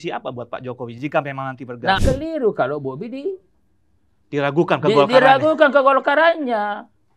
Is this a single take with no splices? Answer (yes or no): no